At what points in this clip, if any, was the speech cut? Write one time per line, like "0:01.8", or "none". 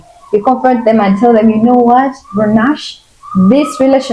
none